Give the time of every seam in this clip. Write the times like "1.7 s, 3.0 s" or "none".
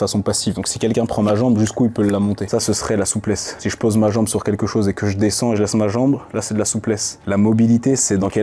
2.4 s, 7.1 s